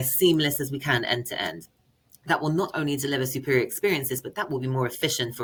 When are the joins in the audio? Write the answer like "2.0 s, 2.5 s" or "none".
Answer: none